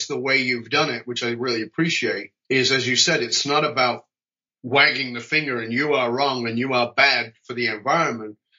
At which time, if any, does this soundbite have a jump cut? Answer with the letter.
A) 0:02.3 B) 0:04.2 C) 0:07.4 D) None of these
A